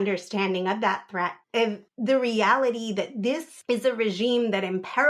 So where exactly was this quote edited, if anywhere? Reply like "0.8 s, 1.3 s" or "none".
3.5 s